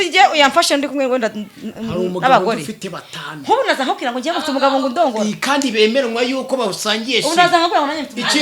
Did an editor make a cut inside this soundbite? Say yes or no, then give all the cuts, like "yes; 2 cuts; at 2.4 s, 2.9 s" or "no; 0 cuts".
no; 0 cuts